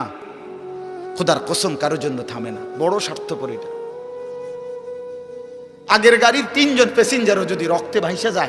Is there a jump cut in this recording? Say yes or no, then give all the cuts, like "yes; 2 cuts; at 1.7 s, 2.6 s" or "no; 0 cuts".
yes; 2 cuts; at 3.4 s, 5.8 s